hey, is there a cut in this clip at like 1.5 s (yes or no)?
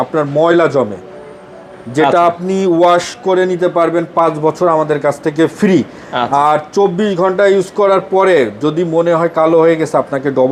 no